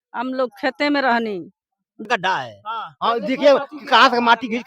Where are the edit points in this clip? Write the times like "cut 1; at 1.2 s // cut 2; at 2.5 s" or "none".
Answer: cut 1; at 2.1 s